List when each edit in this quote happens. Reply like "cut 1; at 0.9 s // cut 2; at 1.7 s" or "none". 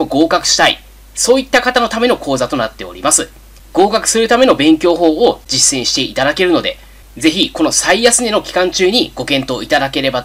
cut 1; at 5.5 s

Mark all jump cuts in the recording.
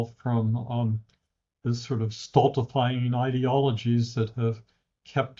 none

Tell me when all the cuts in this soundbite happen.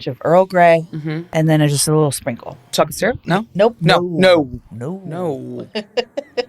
cut 1; at 1.2 s // cut 2; at 2.7 s

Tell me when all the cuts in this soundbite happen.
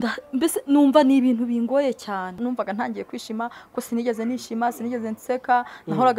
cut 1; at 2.4 s

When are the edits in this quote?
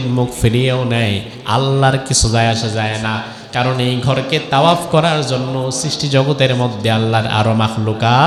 none

